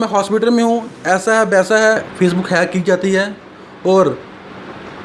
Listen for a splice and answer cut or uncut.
cut